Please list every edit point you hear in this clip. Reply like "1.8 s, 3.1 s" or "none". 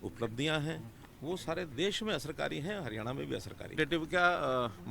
3.7 s